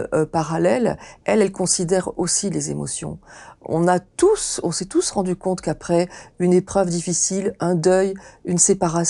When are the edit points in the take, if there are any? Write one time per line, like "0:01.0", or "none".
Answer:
none